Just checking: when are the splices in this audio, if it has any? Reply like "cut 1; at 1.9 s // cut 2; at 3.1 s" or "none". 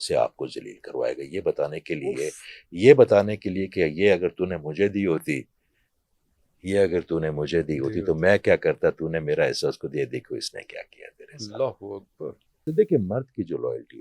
cut 1; at 12.7 s